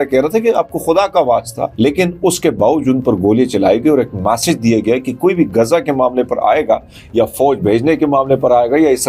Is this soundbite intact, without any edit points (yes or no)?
no